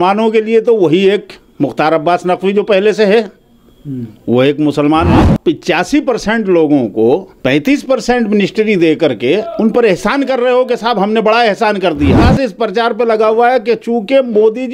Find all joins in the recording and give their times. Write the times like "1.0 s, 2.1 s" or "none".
5.2 s, 12.2 s